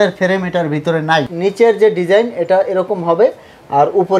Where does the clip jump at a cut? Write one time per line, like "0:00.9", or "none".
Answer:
0:01.3

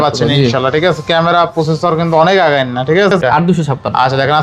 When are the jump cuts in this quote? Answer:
0:03.2

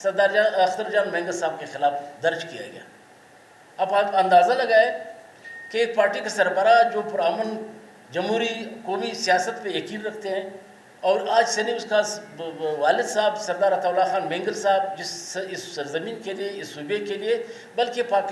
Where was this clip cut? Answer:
none

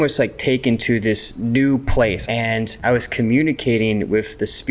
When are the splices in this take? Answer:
0:01.3
0:02.2

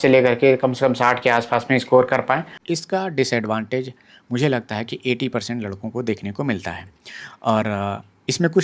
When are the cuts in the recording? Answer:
0:02.6

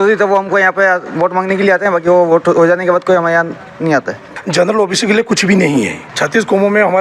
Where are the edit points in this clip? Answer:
0:04.3
0:06.1

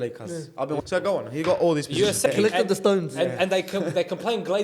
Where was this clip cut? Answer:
0:00.8
0:02.3

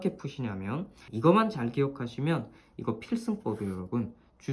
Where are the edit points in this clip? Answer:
0:01.0

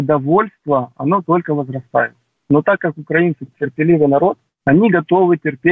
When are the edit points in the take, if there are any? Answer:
0:04.5

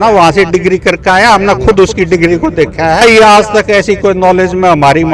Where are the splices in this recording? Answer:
0:03.0

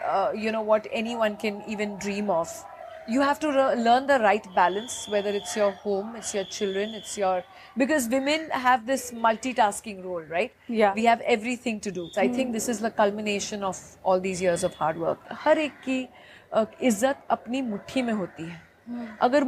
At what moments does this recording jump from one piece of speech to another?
0:12.0
0:15.3

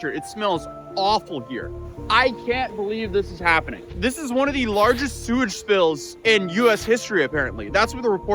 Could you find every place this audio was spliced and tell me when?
0:03.8

